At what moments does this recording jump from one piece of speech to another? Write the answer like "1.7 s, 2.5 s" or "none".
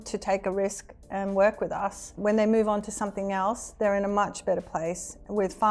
2.0 s